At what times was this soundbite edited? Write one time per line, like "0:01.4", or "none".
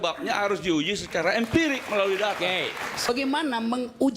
0:03.1